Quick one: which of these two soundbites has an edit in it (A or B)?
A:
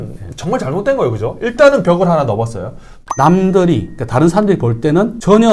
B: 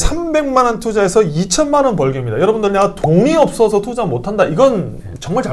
A